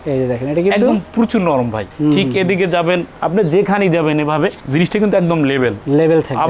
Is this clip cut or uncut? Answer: cut